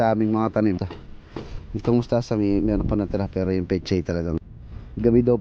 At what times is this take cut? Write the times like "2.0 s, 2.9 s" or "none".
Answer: 0.9 s, 4.4 s